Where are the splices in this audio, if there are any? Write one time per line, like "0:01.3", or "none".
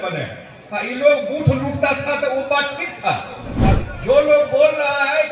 0:03.5

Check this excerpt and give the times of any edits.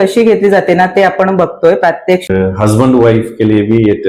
0:02.3

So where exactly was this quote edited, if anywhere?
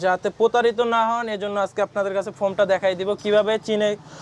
none

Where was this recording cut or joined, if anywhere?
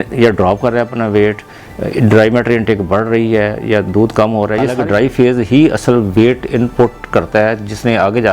0:04.7

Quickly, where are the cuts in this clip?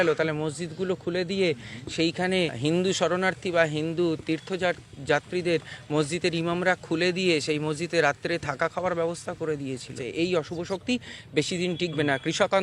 0:02.5
0:10.0

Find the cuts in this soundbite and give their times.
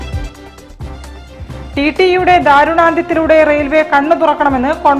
0:01.1

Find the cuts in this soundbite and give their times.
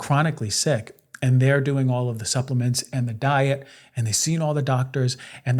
none

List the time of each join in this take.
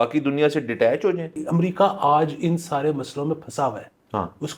0:01.4

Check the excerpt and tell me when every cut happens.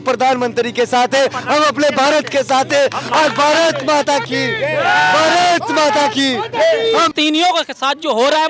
0:07.1

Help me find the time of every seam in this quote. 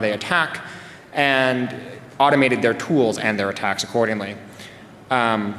0:02.0

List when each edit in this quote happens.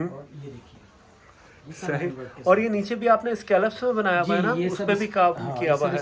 none

